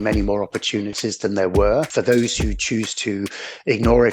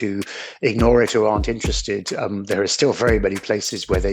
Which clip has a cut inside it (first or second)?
first